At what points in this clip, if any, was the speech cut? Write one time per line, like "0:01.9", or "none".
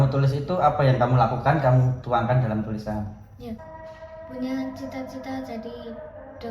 0:03.6